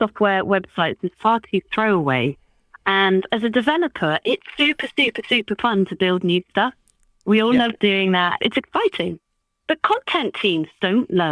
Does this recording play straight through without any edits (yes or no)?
no